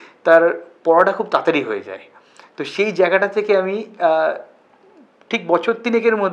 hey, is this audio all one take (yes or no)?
yes